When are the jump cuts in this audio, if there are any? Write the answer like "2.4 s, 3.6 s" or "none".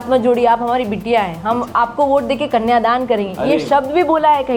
none